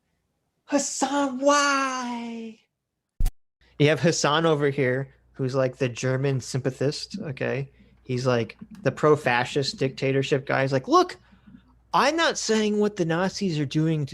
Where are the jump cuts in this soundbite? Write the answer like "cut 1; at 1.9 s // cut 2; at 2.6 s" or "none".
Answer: cut 1; at 3.2 s